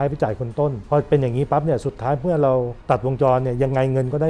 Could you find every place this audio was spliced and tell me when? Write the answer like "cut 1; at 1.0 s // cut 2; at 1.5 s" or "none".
cut 1; at 0.8 s // cut 2; at 2.7 s